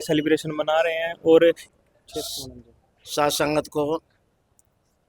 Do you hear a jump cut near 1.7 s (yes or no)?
yes